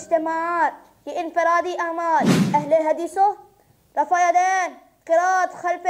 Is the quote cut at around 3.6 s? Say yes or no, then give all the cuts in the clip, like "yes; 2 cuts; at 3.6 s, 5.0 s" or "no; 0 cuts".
no; 1 cut; at 2.4 s